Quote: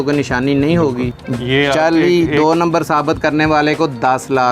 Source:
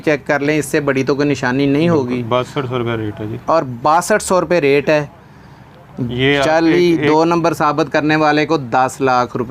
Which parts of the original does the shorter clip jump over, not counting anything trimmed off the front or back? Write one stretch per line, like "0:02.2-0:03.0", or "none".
0:02.2-0:05.8